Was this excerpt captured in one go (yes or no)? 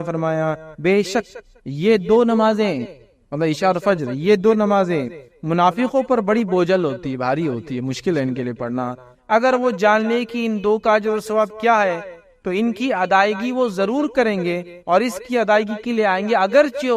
yes